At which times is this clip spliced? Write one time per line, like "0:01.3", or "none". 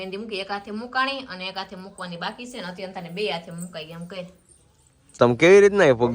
0:05.2